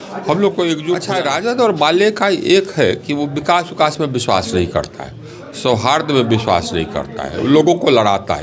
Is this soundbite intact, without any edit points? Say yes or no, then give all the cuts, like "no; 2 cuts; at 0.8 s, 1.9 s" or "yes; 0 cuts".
no; 1 cut; at 1.0 s